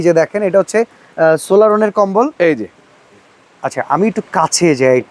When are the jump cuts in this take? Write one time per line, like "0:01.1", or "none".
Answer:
none